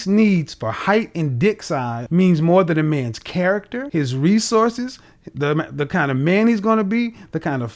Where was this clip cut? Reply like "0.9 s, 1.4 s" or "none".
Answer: 2.0 s, 3.8 s